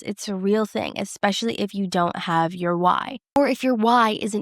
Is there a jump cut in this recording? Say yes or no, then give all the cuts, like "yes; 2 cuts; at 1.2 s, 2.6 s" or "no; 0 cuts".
yes; 1 cut; at 3.4 s